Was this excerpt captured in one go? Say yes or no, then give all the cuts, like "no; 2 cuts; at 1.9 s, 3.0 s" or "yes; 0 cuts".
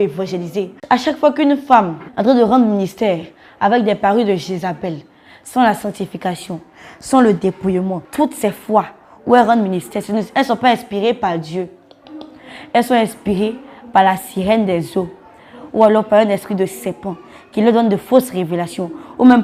no; 3 cuts; at 0.8 s, 2.0 s, 8.0 s